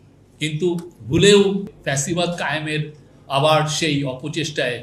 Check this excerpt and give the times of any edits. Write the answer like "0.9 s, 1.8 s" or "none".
1.8 s